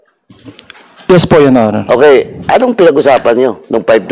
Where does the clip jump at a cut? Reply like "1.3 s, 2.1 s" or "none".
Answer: none